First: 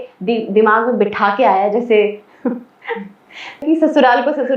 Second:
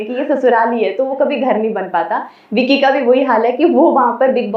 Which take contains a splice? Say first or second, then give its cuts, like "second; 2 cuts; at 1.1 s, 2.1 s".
first; 1 cut; at 3.6 s